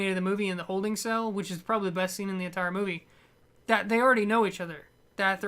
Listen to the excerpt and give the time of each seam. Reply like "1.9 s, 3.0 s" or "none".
4.3 s